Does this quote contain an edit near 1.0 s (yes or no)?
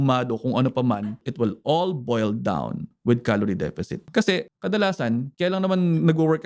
yes